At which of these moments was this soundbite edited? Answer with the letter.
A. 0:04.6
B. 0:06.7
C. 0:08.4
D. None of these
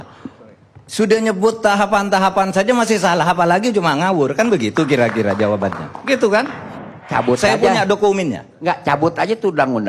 B